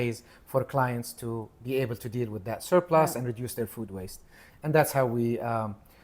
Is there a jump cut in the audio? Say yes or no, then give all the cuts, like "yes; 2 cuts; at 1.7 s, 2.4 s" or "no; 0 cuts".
no; 0 cuts